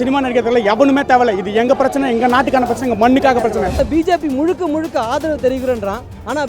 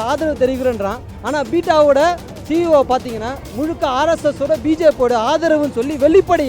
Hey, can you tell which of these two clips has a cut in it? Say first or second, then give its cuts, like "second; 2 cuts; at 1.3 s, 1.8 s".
first; 1 cut; at 3.8 s